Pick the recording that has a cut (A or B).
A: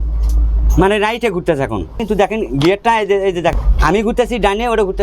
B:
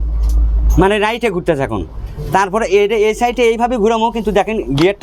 A